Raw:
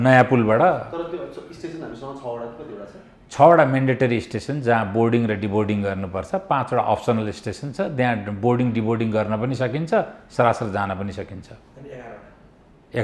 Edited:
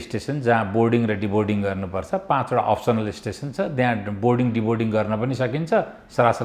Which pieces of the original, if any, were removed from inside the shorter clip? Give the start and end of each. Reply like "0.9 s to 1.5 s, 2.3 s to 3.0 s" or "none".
none